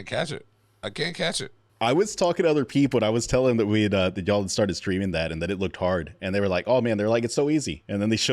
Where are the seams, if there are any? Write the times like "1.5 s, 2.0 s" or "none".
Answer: 1.6 s